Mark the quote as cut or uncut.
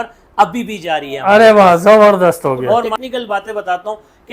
cut